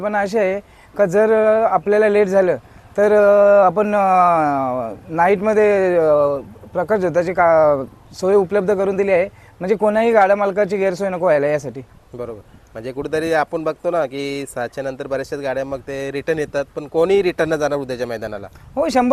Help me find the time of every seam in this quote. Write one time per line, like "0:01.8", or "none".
none